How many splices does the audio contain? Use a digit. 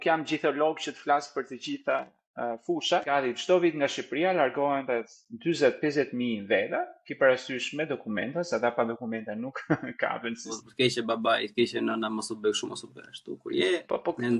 2